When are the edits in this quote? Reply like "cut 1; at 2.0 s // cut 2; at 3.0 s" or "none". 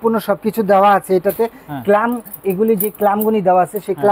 none